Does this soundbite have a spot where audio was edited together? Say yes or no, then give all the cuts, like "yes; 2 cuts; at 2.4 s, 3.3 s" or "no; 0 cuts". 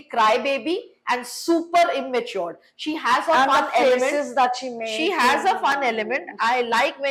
no; 0 cuts